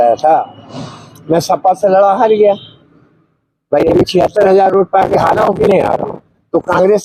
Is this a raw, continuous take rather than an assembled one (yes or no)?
yes